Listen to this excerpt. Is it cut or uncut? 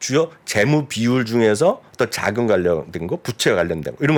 uncut